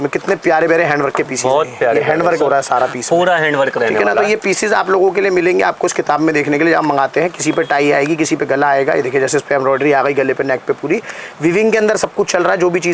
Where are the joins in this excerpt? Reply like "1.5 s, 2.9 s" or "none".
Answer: none